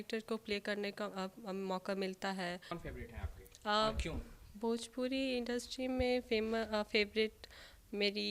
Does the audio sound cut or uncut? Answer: cut